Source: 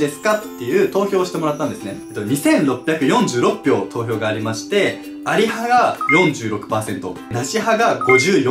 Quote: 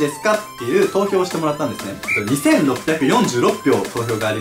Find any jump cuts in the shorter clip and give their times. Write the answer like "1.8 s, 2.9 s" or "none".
none